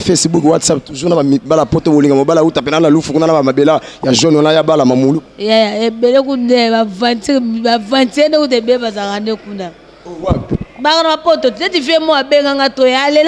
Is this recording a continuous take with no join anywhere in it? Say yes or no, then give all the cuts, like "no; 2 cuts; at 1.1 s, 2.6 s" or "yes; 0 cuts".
yes; 0 cuts